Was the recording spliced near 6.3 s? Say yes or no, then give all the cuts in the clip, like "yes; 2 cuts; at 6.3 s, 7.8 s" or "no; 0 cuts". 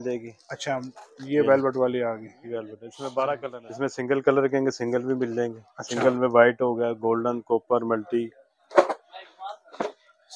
no; 1 cut; at 3.6 s